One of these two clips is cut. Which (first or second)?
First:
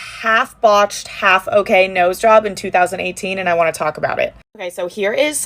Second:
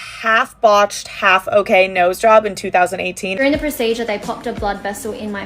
second